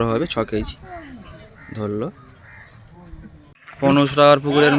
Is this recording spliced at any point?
yes; 1 cut; at 3.5 s

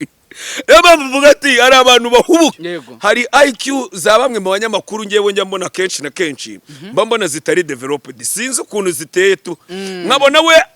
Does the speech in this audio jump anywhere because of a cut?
yes; 1 cut; at 2.7 s

